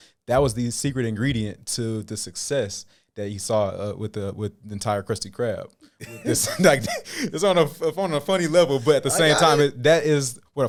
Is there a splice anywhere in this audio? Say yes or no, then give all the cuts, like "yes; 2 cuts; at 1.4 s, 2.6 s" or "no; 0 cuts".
no; 0 cuts